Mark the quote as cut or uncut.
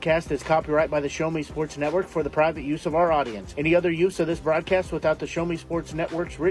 uncut